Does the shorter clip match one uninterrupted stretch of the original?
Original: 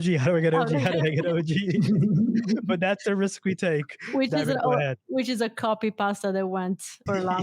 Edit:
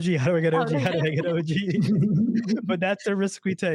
yes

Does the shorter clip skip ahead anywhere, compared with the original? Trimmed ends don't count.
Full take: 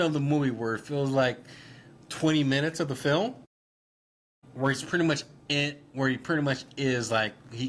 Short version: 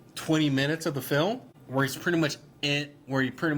yes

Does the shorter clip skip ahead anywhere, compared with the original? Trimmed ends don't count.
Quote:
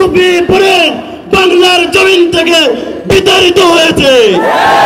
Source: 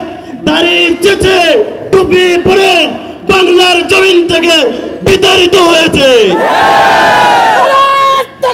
no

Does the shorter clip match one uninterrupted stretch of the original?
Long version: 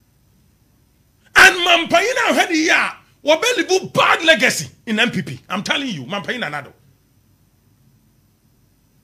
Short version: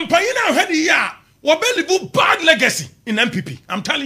yes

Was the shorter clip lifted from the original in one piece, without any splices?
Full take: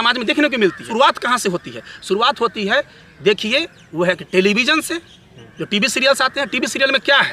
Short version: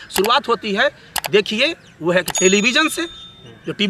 yes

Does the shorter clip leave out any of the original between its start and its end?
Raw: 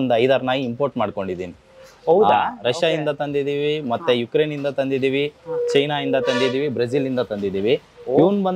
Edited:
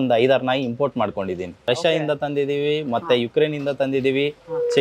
yes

